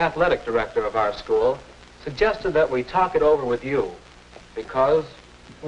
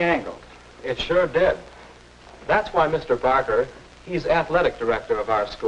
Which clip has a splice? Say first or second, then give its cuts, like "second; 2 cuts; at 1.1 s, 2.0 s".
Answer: second; 1 cut; at 3.0 s